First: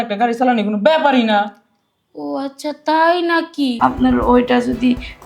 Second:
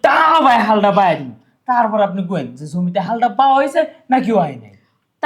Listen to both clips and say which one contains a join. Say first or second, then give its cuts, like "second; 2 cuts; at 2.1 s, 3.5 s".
first; 1 cut; at 3.7 s